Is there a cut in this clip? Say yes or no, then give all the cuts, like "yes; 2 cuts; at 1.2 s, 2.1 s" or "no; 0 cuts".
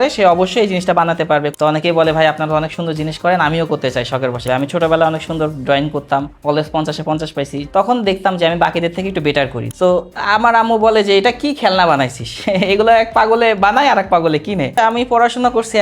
yes; 5 cuts; at 1.5 s, 4.4 s, 7.6 s, 9.6 s, 14.8 s